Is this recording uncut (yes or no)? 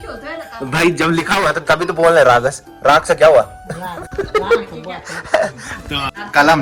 yes